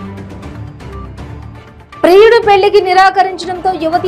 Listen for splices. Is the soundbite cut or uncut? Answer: uncut